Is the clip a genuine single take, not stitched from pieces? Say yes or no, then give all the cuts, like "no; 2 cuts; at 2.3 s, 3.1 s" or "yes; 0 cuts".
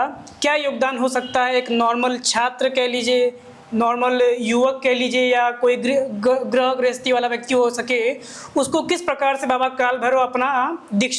yes; 0 cuts